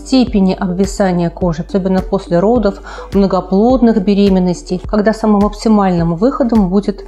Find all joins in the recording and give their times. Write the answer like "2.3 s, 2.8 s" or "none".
1.6 s, 4.8 s